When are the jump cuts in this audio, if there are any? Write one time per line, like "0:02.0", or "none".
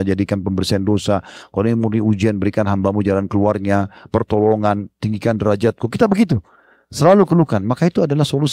none